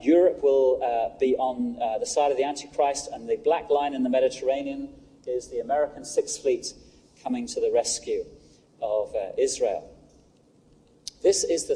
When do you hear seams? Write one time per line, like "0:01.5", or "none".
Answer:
0:05.1